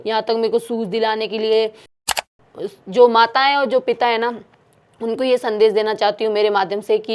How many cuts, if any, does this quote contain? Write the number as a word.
one